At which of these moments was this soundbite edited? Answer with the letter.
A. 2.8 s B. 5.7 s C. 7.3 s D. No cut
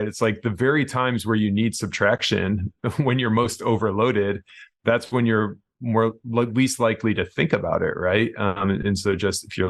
D